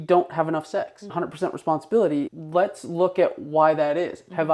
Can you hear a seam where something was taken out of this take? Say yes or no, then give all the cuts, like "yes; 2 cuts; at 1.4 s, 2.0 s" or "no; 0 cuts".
yes; 2 cuts; at 1.1 s, 2.3 s